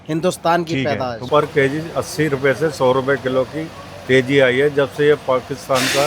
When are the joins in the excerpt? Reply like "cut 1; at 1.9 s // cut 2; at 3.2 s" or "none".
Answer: cut 1; at 1.2 s